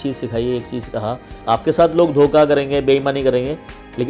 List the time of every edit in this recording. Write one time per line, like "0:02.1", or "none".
0:01.4